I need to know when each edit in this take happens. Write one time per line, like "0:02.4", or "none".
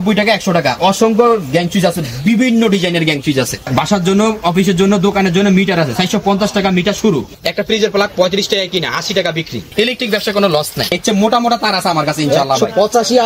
0:03.6
0:07.4
0:09.7
0:10.9